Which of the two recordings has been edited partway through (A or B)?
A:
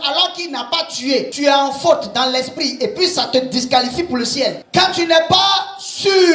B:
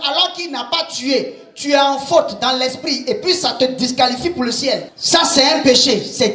A